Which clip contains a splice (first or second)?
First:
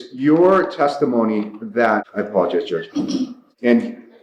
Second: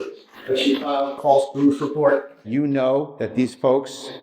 second